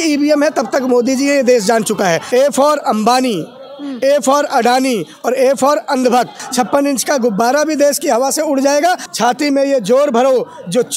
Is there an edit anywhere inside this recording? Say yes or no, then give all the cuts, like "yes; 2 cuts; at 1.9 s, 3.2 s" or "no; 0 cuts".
yes; 3 cuts; at 2.2 s, 6.4 s, 9.1 s